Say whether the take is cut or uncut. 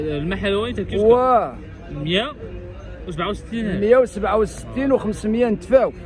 uncut